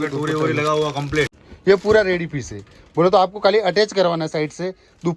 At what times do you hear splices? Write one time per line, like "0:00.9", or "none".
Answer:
0:01.4

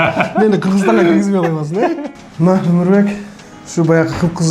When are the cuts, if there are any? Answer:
0:02.2

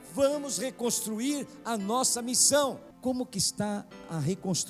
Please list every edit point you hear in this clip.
0:02.9

